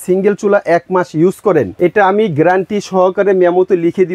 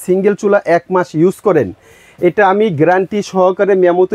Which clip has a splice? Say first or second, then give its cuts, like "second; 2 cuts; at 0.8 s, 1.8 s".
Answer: first; 1 cut; at 1.7 s